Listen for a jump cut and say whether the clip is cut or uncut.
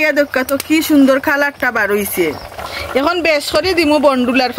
uncut